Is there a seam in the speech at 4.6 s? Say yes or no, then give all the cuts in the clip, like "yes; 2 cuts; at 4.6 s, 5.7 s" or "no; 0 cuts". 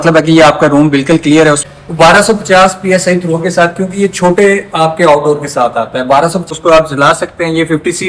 no; 2 cuts; at 1.7 s, 6.4 s